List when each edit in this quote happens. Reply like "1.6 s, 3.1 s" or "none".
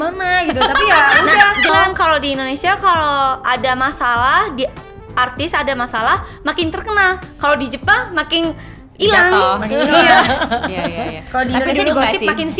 1.7 s